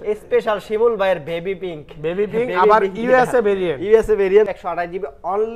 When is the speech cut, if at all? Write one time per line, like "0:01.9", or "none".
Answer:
0:04.5